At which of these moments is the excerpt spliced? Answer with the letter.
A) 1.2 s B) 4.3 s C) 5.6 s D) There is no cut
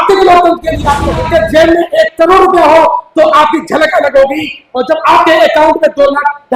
A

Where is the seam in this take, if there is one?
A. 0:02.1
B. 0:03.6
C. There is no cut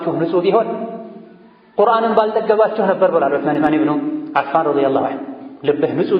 B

